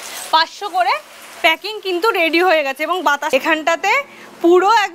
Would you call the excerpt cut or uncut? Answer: cut